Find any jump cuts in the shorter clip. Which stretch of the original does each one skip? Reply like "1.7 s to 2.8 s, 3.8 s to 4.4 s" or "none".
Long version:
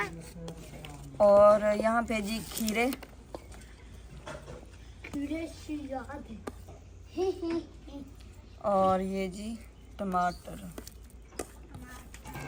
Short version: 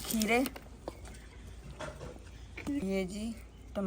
5.3 s to 9.1 s